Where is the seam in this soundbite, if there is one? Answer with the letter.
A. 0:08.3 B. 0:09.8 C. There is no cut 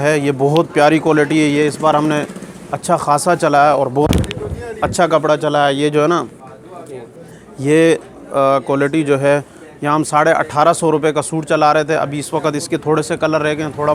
C